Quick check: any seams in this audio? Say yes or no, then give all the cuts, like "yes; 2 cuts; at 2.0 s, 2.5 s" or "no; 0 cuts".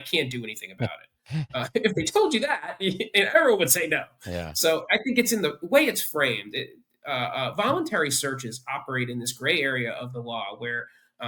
no; 0 cuts